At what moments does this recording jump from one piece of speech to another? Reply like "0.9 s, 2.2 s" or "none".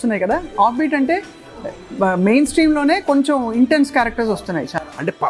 none